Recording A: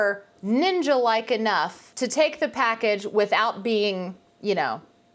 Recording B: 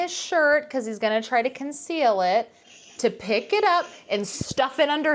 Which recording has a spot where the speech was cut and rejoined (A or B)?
B